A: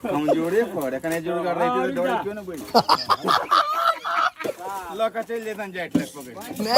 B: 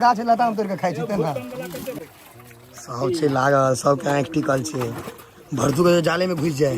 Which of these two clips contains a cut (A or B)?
B